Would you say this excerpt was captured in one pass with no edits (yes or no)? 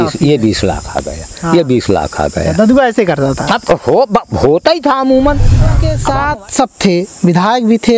no